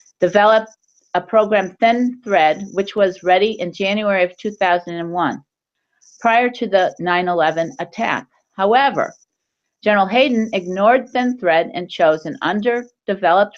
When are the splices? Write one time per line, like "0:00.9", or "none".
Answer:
0:06.3